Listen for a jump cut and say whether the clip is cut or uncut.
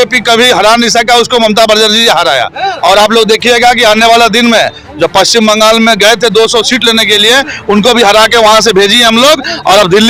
uncut